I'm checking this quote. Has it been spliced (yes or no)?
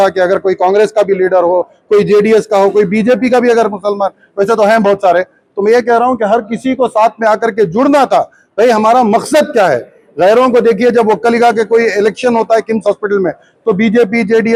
no